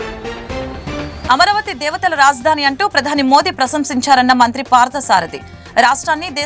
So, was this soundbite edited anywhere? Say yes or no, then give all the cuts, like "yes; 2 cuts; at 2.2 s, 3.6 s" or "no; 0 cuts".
yes; 1 cut; at 1.2 s